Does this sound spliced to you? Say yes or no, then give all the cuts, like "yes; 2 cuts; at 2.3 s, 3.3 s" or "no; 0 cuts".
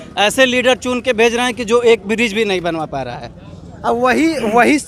no; 0 cuts